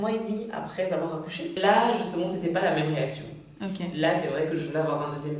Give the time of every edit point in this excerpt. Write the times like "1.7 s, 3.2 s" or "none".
1.6 s